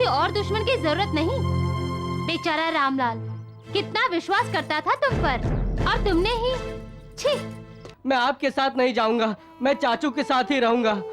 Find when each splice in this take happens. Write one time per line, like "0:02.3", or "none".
0:07.8